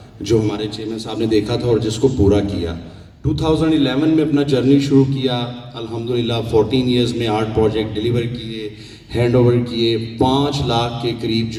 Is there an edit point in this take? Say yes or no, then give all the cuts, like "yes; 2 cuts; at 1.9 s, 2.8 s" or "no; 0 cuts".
no; 0 cuts